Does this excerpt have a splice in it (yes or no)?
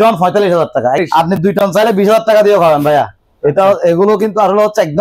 yes